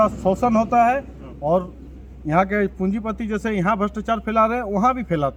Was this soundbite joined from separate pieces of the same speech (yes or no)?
no